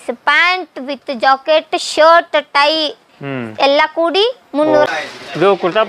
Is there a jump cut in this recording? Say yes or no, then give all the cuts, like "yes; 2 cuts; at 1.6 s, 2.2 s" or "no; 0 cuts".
yes; 1 cut; at 4.9 s